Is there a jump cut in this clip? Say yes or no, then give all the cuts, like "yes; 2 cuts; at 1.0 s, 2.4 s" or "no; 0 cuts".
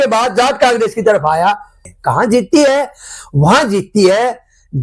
yes; 1 cut; at 1.8 s